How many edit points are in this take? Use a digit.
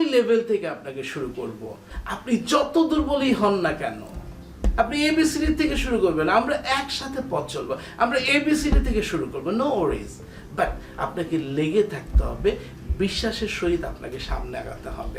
1